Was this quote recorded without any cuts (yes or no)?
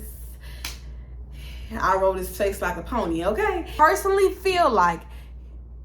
no